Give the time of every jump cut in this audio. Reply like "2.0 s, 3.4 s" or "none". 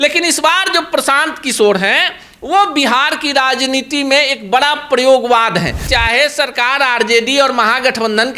5.8 s